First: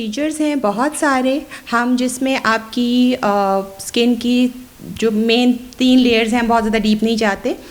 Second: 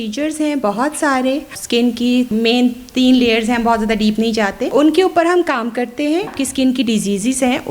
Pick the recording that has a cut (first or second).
second